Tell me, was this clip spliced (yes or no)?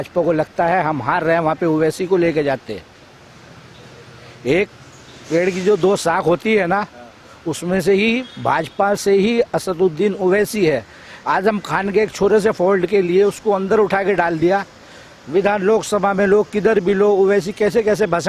no